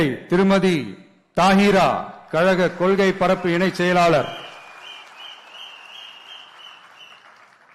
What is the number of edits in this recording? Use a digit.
0